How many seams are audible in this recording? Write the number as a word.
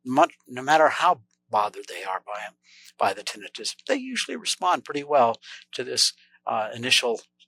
zero